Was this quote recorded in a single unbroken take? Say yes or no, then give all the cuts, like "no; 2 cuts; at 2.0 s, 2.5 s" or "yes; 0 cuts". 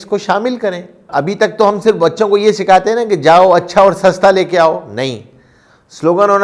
no; 1 cut; at 1.1 s